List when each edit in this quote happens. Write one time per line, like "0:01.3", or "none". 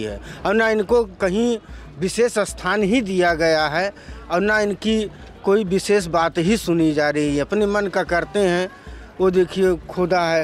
none